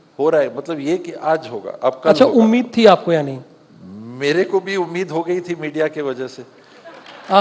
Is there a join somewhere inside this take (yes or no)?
no